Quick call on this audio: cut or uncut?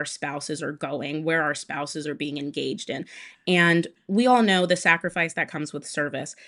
uncut